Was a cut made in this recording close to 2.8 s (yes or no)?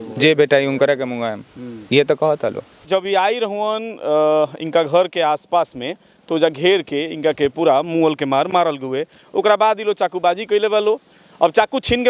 yes